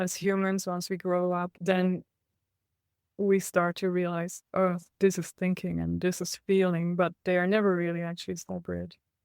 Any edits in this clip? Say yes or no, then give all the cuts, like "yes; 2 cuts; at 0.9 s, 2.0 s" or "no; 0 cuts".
yes; 1 cut; at 1.5 s